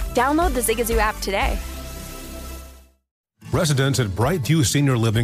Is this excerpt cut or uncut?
cut